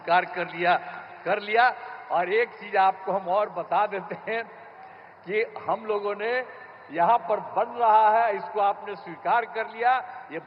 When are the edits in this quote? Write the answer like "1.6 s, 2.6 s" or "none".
none